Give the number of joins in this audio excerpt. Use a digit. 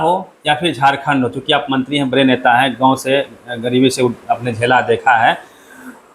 0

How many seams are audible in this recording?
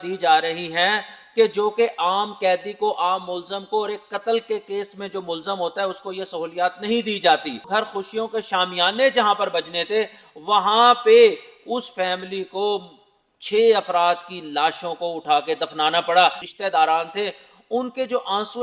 2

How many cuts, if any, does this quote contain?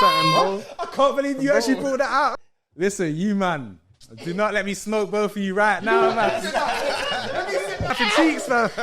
2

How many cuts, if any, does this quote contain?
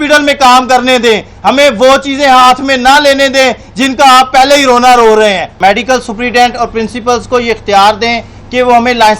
1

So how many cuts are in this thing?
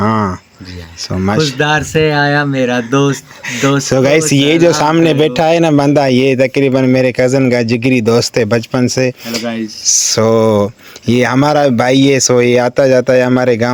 0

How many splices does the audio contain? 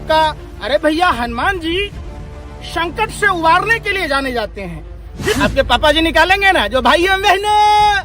1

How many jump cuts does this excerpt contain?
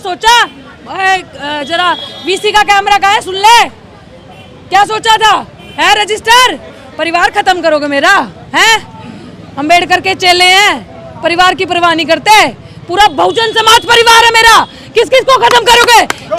0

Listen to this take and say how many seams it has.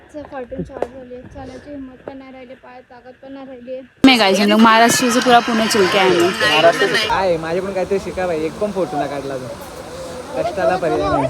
2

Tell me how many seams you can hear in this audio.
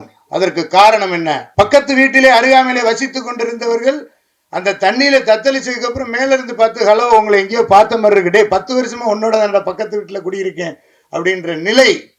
1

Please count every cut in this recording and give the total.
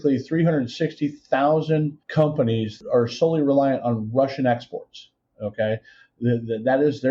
1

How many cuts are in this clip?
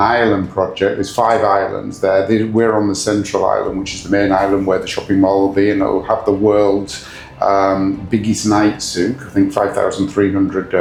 0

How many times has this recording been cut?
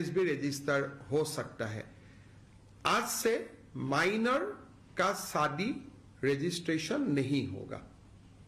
1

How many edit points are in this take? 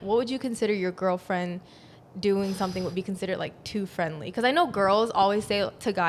0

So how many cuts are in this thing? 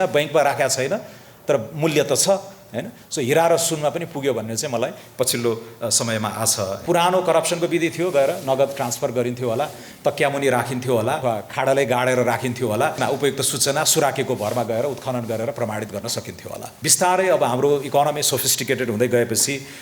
4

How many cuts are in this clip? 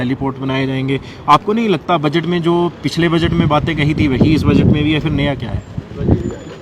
0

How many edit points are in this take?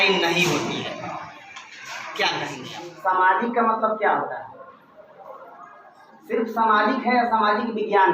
2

